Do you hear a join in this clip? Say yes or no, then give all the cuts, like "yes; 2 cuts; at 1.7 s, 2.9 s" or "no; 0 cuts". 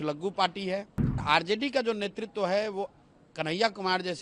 yes; 1 cut; at 1.2 s